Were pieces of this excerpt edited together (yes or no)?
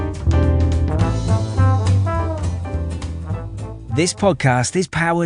no